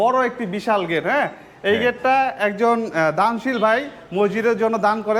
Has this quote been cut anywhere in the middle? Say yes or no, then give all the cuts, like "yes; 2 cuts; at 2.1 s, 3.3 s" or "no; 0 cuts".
no; 0 cuts